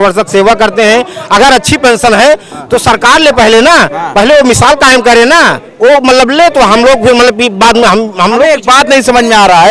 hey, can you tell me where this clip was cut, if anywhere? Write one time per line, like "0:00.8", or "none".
none